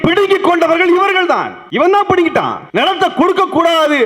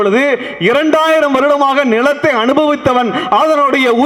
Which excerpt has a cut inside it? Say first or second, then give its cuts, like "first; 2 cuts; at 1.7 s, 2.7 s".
first; 2 cuts; at 1.6 s, 2.6 s